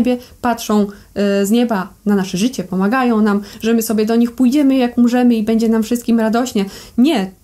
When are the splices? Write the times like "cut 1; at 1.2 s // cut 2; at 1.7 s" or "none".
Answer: none